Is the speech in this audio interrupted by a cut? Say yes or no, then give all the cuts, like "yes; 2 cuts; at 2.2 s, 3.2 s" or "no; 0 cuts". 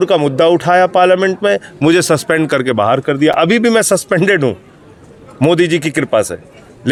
no; 0 cuts